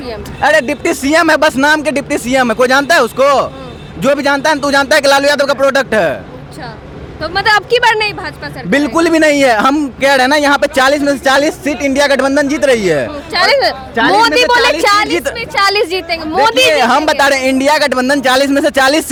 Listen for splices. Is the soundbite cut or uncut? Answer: uncut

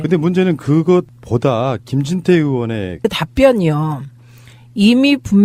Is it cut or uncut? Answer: uncut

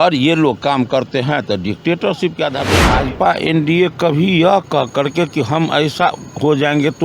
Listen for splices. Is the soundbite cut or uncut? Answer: cut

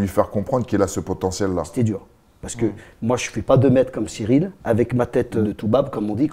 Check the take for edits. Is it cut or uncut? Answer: cut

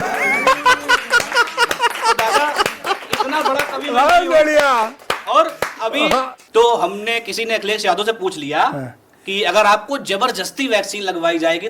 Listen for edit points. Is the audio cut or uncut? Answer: cut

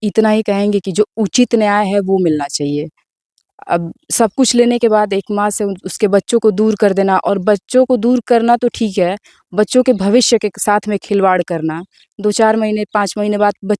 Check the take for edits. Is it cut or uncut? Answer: uncut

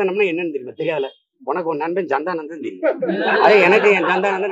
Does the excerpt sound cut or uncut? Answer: uncut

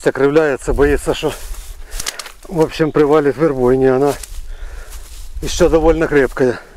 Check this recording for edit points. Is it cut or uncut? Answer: uncut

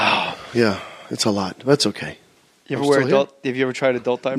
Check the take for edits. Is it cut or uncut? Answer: uncut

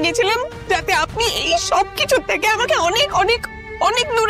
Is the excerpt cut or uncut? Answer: uncut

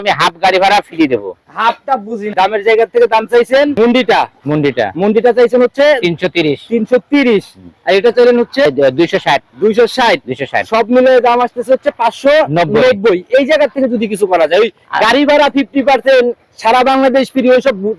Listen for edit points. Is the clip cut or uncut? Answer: cut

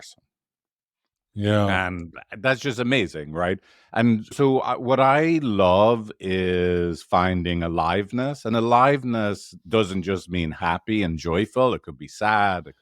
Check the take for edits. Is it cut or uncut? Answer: uncut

